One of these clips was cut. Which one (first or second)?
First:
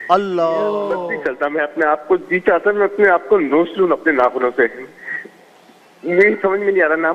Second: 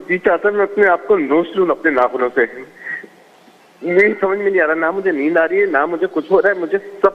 first